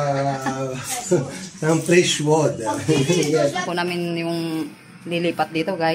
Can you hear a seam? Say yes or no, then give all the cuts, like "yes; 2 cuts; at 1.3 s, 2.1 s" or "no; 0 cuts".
yes; 1 cut; at 3.6 s